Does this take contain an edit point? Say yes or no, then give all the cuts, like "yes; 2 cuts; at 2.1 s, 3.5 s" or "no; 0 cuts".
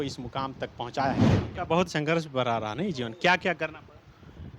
yes; 1 cut; at 1.3 s